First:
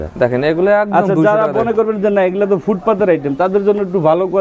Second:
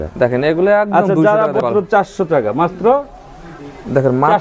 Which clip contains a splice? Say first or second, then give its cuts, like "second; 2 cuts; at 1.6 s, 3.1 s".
second; 1 cut; at 1.6 s